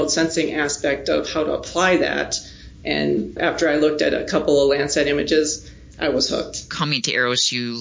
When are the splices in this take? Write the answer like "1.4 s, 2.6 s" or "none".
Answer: 6.7 s

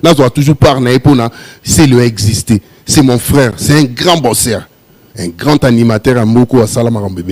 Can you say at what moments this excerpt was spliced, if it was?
none

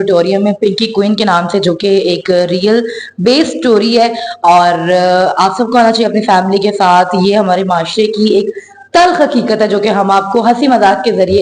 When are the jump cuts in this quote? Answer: none

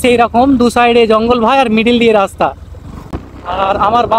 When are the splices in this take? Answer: 3.2 s

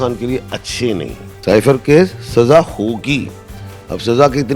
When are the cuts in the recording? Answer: 1.2 s

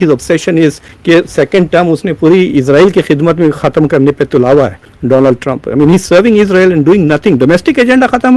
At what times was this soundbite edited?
none

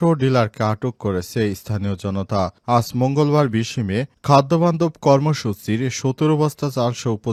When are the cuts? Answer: none

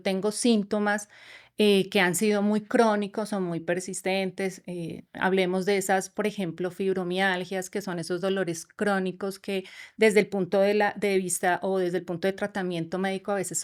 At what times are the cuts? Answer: none

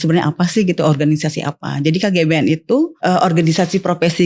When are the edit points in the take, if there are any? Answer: 3.0 s

